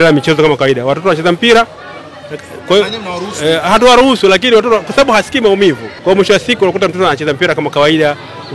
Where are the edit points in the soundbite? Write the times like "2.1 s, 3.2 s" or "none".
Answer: 5.9 s